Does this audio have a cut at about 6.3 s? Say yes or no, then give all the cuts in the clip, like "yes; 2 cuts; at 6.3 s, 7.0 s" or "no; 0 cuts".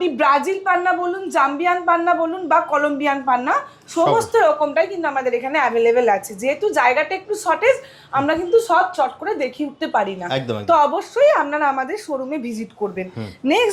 no; 0 cuts